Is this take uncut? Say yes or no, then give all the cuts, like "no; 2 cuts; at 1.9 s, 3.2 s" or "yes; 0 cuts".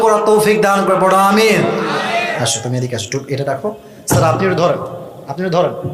no; 1 cut; at 2.3 s